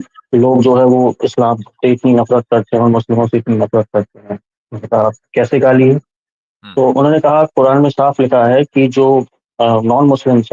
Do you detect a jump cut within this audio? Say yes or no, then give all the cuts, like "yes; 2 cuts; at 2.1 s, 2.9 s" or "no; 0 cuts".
no; 0 cuts